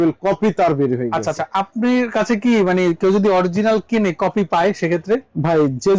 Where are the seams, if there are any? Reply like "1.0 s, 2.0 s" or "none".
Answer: none